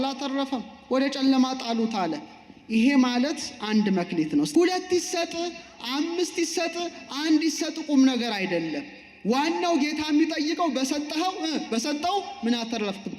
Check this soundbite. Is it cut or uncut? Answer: cut